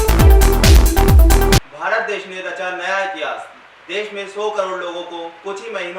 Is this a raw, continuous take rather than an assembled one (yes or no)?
no